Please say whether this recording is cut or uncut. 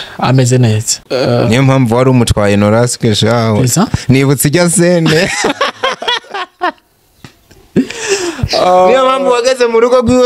cut